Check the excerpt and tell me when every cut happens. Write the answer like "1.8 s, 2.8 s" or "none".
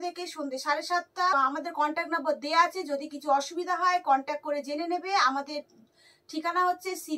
1.3 s